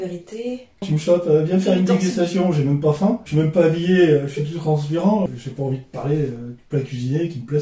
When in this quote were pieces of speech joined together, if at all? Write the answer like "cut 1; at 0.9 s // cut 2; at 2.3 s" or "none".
cut 1; at 0.8 s // cut 2; at 3.3 s // cut 3; at 5.3 s